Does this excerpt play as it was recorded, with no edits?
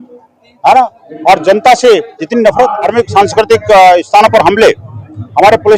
no; 1 cut; at 2.9 s

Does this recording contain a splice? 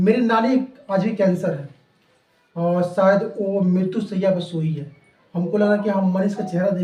no; 0 cuts

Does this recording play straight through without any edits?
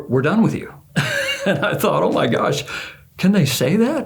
yes; 0 cuts

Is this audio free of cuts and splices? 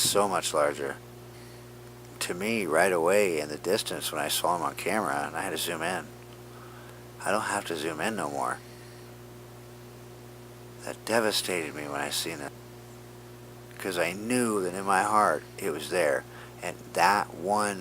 no; 1 cut; at 13.7 s

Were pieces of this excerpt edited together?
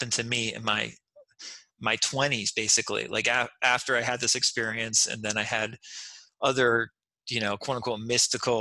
no; 0 cuts

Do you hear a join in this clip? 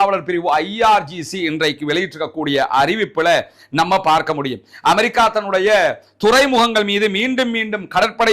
no; 0 cuts

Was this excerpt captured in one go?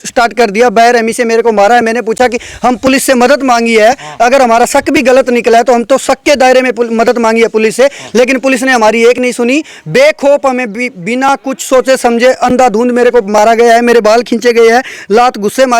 yes; 0 cuts

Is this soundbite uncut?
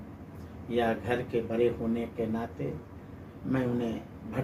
yes; 0 cuts

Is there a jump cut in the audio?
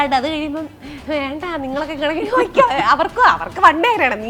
no; 0 cuts

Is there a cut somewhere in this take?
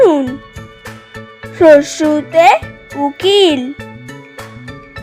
yes; 1 cut; at 3.8 s

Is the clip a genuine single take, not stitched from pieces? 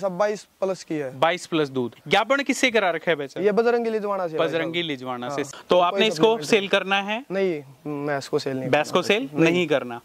no; 2 cuts; at 2.0 s, 5.5 s

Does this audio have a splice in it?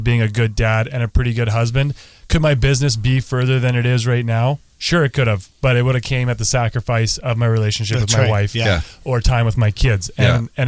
no; 0 cuts

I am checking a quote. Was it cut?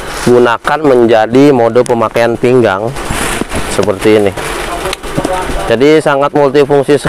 no; 0 cuts

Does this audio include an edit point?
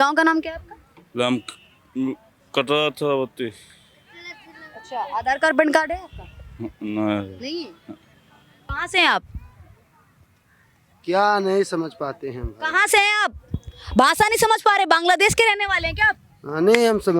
yes; 1 cut; at 8.8 s

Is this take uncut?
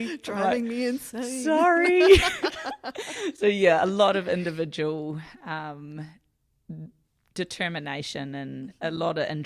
yes; 0 cuts

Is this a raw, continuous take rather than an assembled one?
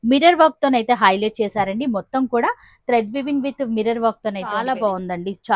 no; 1 cut; at 4.6 s

